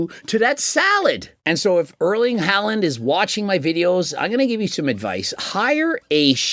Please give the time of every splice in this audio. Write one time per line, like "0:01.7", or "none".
0:01.3